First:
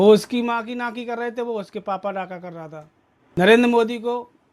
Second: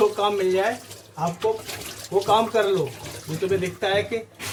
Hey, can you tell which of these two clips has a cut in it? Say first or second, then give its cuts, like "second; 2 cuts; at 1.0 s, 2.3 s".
first; 1 cut; at 3.4 s